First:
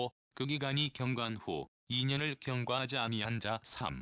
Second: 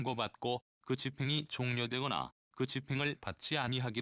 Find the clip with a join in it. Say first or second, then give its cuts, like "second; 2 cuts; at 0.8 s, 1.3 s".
first; 1 cut; at 3.0 s